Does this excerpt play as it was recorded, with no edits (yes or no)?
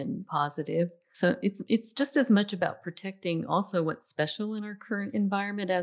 no